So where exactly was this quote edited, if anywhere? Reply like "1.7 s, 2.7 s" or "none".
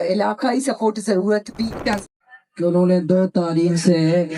1.9 s